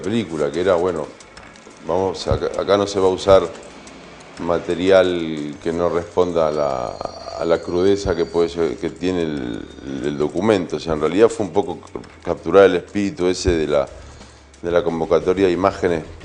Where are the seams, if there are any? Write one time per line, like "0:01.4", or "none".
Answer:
0:07.7